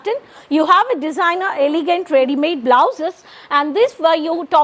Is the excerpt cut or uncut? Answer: uncut